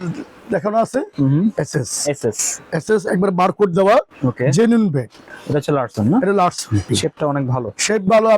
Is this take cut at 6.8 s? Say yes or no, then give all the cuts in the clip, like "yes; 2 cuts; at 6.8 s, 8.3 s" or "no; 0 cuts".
yes; 2 cuts; at 5.2 s, 6.8 s